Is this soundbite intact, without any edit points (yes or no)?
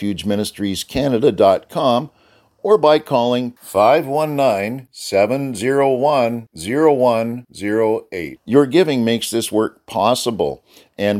yes